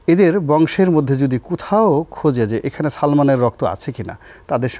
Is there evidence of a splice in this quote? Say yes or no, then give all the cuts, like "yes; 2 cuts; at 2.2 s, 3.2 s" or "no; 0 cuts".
no; 0 cuts